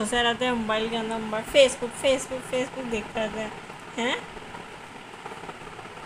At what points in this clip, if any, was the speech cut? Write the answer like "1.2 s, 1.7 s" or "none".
4.3 s